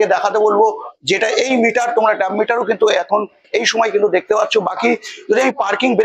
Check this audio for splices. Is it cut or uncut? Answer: uncut